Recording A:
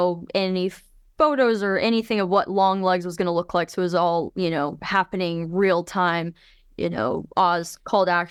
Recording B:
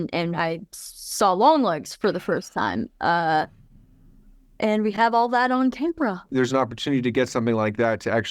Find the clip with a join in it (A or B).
B